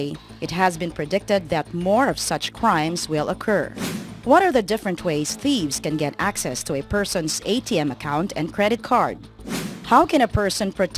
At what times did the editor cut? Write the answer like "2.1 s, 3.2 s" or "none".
0.9 s